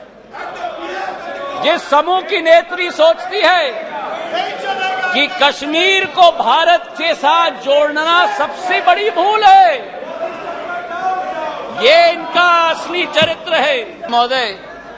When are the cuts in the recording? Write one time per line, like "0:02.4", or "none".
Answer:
0:14.0